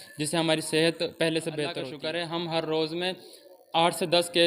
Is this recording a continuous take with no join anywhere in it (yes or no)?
no